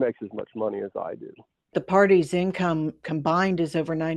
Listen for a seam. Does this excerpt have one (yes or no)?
yes